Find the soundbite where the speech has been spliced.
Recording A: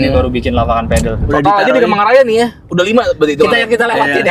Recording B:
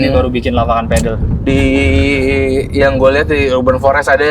A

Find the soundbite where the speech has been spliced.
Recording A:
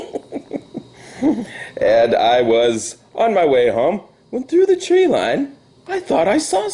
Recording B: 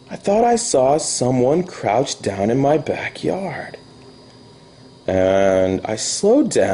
B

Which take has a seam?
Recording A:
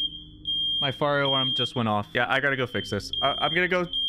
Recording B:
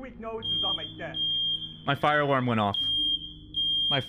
A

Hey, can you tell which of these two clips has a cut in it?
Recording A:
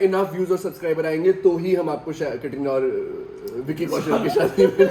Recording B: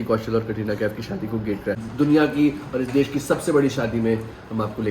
B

